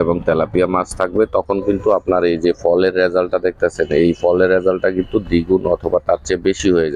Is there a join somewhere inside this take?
no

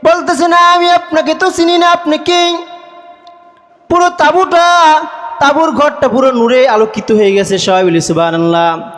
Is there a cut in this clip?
no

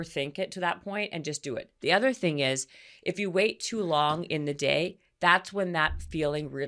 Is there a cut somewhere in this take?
no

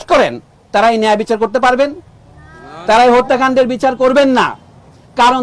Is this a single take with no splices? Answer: yes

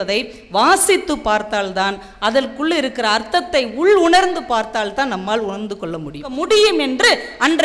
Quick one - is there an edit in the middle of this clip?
yes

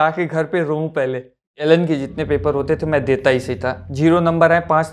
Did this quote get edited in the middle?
yes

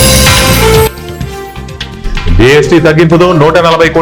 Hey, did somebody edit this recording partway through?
no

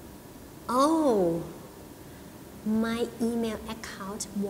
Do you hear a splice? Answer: no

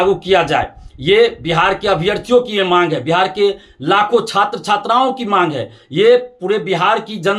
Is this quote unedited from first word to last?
yes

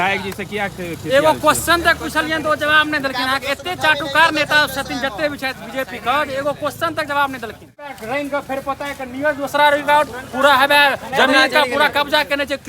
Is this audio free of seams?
no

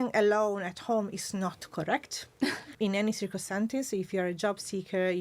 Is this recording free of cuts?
no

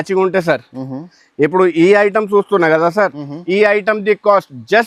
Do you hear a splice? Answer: no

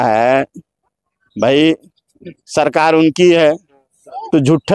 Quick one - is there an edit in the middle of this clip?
no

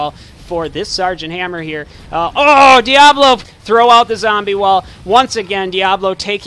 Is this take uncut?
no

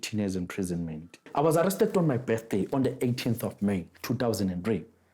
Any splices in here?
yes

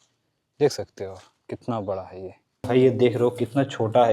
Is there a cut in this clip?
yes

